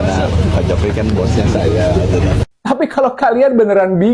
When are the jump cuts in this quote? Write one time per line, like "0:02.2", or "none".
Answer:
0:02.5